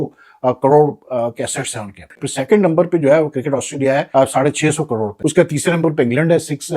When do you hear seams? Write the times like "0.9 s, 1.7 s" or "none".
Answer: 2.1 s, 4.1 s, 5.1 s